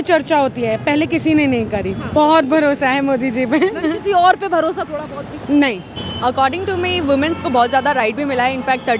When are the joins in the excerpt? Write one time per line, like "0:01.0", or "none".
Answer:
0:02.1
0:05.9